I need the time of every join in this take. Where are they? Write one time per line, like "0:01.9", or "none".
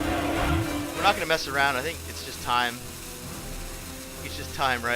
0:01.0